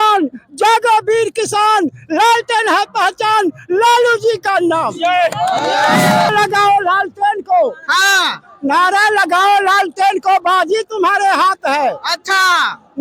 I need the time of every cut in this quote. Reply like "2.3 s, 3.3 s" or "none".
6.3 s

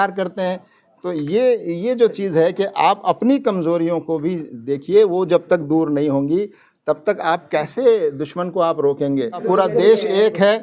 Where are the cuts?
9.4 s

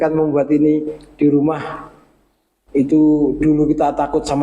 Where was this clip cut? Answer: none

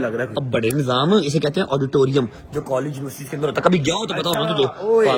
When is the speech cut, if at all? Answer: none

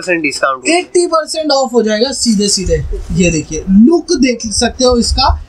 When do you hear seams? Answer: none

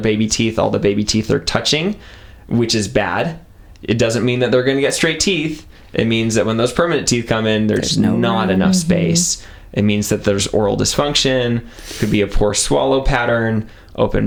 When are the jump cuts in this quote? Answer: none

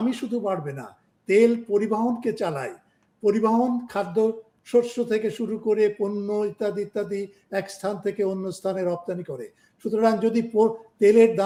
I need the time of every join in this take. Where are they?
none

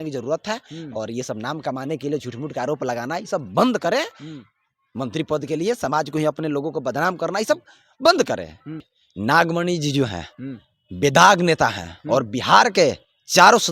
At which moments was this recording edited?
8.9 s

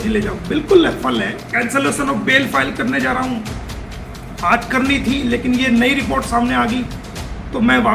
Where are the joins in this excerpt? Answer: 1.5 s

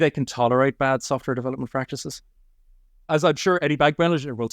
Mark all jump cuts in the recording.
2.7 s

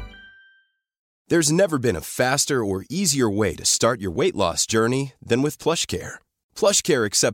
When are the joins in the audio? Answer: 1.1 s

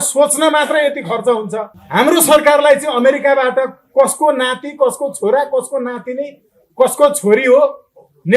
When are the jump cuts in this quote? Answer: 1.7 s

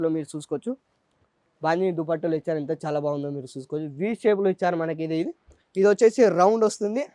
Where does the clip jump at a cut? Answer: none

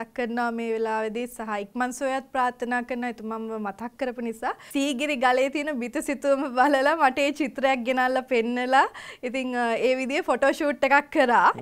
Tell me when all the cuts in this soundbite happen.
4.6 s

